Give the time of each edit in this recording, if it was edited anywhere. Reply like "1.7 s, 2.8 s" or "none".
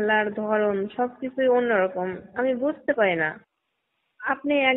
none

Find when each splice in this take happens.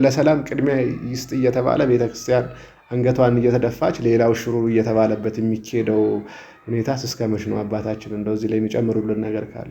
none

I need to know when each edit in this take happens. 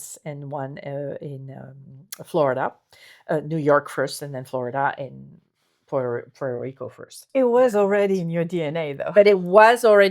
7.1 s

